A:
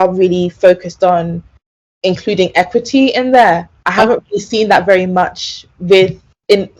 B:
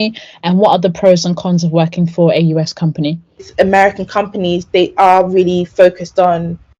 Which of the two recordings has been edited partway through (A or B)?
B